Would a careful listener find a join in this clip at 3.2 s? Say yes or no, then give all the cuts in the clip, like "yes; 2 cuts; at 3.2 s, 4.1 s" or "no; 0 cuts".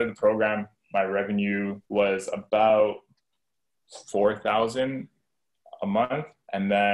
no; 1 cut; at 1.8 s